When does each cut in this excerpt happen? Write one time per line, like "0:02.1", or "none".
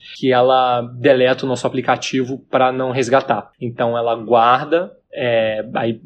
0:03.6
0:05.0

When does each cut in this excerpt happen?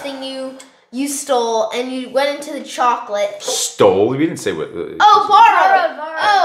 none

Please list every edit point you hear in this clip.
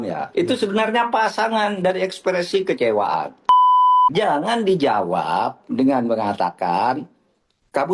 none

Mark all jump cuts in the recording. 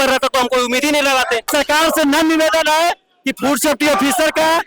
0:01.5

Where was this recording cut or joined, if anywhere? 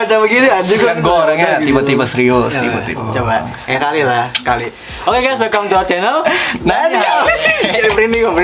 none

